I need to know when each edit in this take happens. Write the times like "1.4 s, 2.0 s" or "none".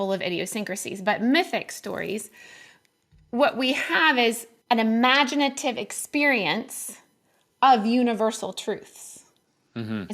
4.5 s